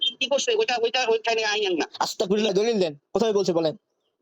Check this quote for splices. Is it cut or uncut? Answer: cut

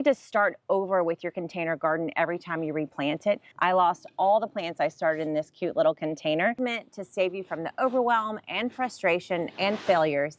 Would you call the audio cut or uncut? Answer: cut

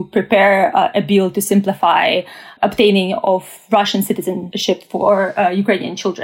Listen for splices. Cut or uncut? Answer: cut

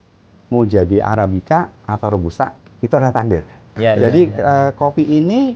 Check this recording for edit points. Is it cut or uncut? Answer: cut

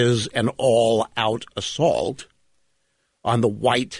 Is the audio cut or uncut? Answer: uncut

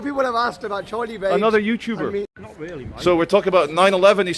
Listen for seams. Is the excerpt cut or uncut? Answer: cut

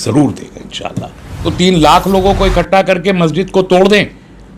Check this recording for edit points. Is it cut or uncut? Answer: cut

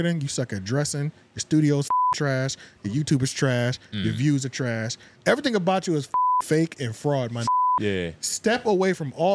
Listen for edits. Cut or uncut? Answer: uncut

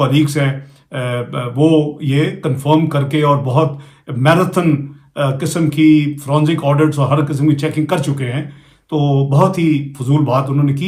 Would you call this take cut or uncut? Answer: uncut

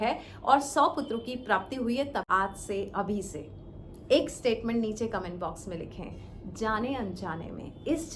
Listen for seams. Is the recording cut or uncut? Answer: cut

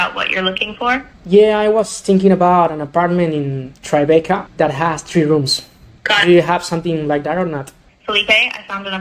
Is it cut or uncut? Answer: cut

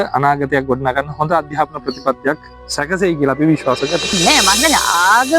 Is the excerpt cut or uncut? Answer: cut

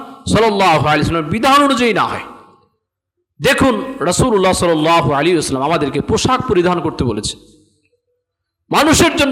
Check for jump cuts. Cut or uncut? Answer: uncut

